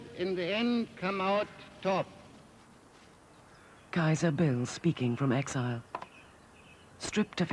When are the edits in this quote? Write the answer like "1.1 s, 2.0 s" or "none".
2.1 s